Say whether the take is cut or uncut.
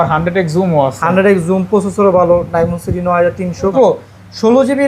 cut